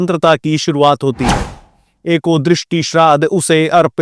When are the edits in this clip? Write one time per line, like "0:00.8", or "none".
none